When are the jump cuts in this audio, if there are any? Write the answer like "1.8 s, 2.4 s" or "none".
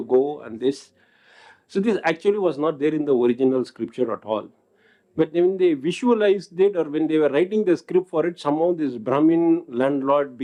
none